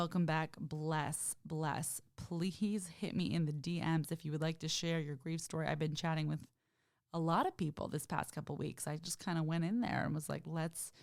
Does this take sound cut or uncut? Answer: uncut